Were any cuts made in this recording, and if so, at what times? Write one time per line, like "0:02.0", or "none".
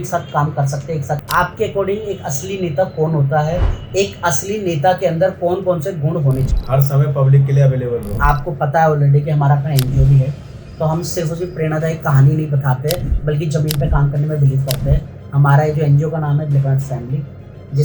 0:01.2
0:06.5
0:08.1